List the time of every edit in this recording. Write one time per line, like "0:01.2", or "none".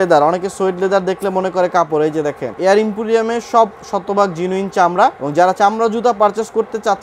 0:02.5
0:05.2